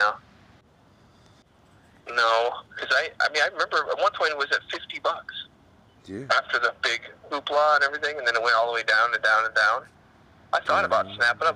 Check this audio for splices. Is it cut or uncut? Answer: uncut